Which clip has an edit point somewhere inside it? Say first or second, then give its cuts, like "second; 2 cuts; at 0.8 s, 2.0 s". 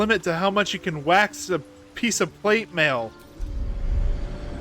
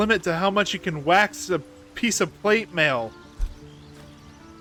first; 1 cut; at 3.5 s